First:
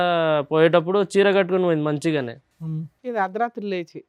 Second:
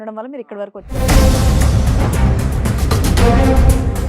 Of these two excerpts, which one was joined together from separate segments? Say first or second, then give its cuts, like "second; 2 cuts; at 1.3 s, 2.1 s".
second; 1 cut; at 0.9 s